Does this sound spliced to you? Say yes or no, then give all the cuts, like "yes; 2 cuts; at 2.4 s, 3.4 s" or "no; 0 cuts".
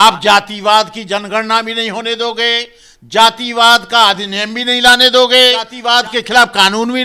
yes; 1 cut; at 5.8 s